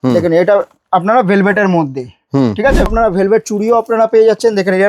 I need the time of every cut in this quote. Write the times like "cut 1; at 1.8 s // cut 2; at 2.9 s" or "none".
cut 1; at 2.9 s